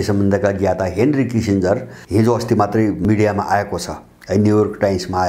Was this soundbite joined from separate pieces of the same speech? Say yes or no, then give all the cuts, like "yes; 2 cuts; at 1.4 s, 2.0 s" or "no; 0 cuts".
yes; 2 cuts; at 1.9 s, 3.0 s